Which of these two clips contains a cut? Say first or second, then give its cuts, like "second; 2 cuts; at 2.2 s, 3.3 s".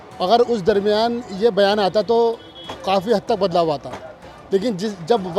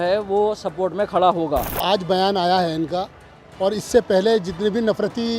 second; 1 cut; at 1.7 s